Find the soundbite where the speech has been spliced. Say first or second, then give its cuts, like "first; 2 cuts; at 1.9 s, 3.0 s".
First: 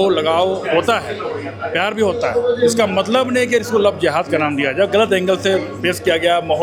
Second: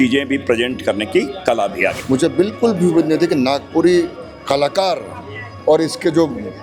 second; 1 cut; at 2.0 s